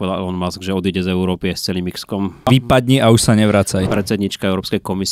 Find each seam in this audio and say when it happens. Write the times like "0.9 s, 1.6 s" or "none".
2.5 s, 3.8 s